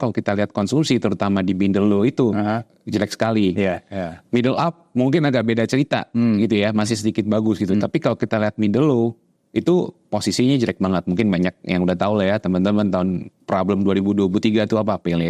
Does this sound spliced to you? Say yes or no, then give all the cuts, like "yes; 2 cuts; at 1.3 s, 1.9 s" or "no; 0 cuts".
no; 0 cuts